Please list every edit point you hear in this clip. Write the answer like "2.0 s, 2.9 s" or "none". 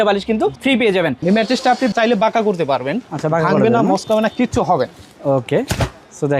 1.2 s